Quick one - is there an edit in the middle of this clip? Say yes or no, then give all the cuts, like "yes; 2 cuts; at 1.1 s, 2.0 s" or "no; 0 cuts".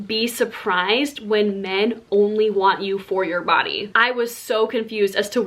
yes; 1 cut; at 3.8 s